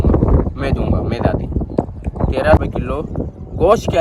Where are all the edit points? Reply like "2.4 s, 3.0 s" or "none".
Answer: 2.6 s